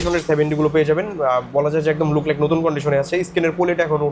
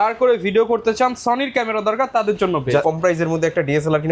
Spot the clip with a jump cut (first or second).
second